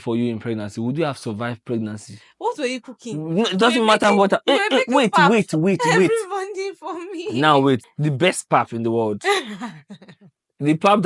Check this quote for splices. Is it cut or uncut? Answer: cut